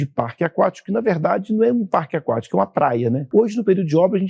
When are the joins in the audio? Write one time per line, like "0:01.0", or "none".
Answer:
0:03.2